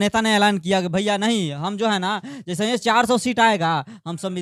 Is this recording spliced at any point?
no; 0 cuts

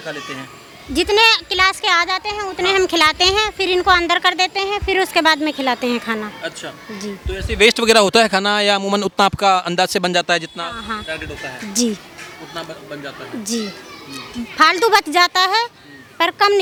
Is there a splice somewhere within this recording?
no; 0 cuts

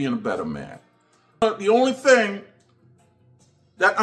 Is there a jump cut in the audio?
yes; 1 cut; at 1.4 s

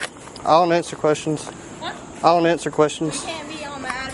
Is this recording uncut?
yes; 0 cuts

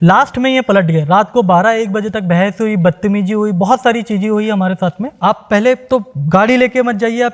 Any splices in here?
yes; 1 cut; at 5.1 s

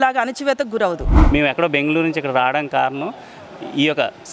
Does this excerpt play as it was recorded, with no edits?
no; 1 cut; at 1.1 s

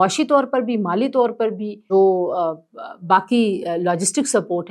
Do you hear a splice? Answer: yes; 1 cut; at 1.7 s

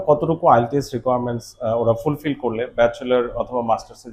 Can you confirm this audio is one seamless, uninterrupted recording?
yes; 0 cuts

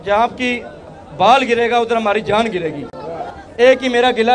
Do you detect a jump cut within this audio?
yes; 1 cut; at 3.2 s

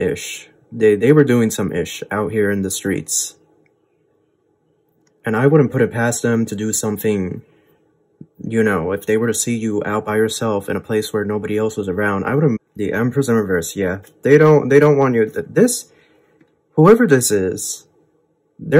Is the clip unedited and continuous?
no; 1 cut; at 12.7 s

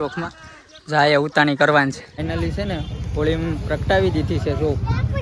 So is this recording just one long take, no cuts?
no; 1 cut; at 2.3 s

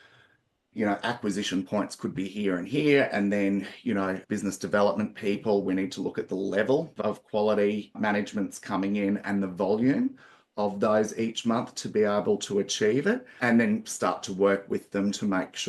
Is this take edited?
yes; 2 cuts; at 6.9 s, 13.3 s

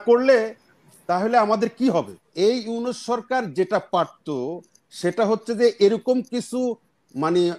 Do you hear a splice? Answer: yes; 1 cut; at 2.2 s

